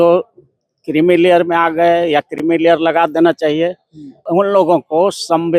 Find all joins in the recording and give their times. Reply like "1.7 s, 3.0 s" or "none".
4.2 s